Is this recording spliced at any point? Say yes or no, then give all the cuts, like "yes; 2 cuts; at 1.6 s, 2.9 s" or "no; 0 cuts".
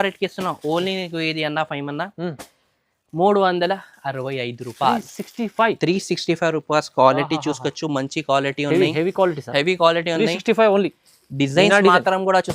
no; 0 cuts